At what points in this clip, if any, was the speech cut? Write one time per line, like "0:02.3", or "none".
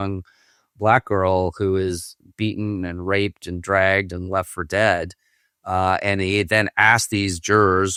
none